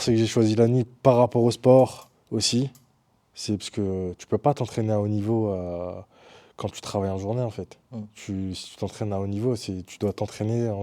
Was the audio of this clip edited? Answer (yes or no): no